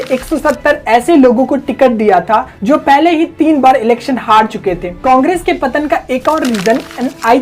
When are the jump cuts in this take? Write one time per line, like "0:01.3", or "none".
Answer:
0:04.9

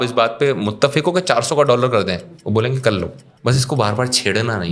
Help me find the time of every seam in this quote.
0:03.2

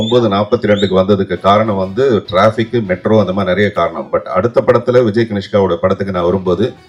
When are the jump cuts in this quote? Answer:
none

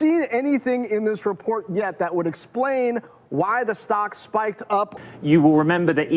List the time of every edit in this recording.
0:04.9

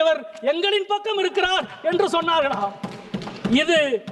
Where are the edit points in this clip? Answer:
none

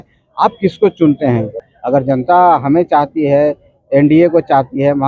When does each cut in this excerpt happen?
0:01.6

